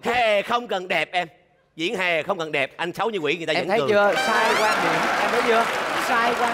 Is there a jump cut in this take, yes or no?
no